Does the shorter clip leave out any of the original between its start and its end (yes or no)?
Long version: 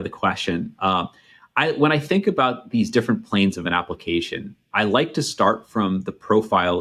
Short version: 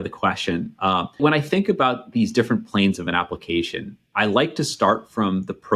yes